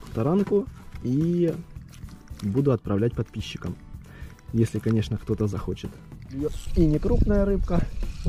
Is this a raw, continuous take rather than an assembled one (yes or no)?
no